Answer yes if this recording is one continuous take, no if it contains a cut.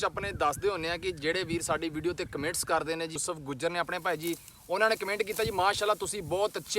no